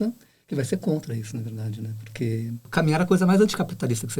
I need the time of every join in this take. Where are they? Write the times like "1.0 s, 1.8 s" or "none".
2.7 s

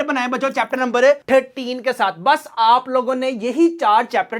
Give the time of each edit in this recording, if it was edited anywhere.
none

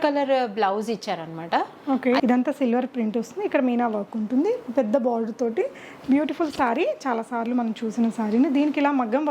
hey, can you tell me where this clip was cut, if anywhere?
2.2 s

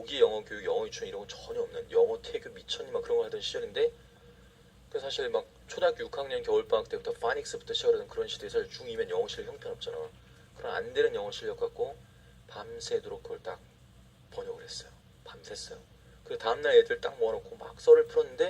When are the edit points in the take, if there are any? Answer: 5.9 s

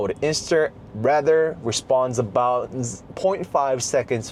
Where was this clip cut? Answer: none

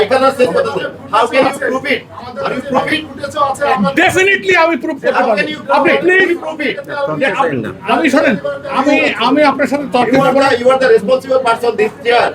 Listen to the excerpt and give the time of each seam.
none

